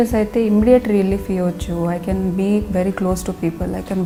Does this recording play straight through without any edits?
yes; 0 cuts

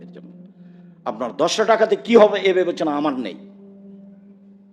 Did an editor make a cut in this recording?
yes; 1 cut; at 1.0 s

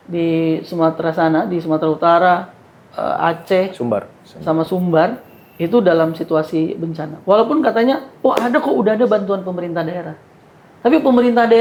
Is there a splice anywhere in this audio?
no; 0 cuts

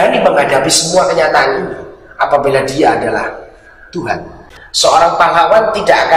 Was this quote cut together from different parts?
yes; 1 cut; at 4.3 s

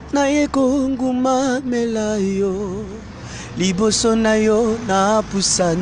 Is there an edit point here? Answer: no; 0 cuts

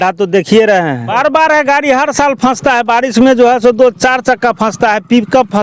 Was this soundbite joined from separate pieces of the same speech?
yes; 1 cut; at 1.1 s

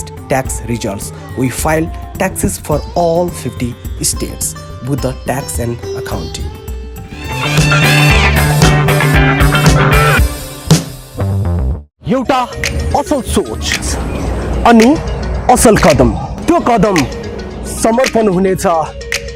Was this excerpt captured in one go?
yes; 0 cuts

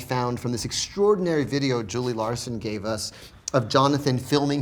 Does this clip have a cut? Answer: no; 0 cuts

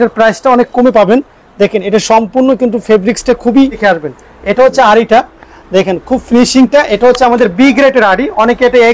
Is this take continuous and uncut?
no; 1 cut; at 3.8 s

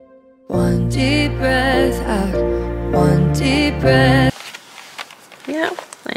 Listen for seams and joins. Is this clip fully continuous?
no; 1 cut; at 4.3 s

